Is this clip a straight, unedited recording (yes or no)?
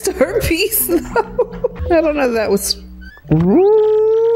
no